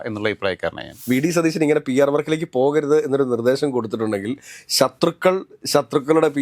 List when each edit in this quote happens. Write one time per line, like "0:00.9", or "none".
0:01.0